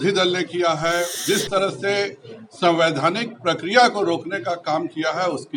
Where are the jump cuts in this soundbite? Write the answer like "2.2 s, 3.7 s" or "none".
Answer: 1.1 s